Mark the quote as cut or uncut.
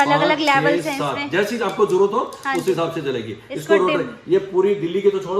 uncut